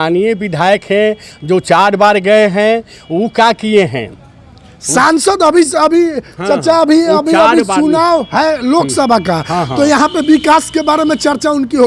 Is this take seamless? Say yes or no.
yes